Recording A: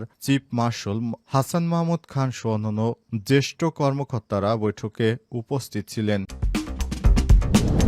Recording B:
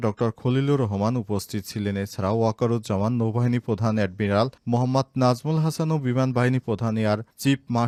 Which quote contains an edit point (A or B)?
A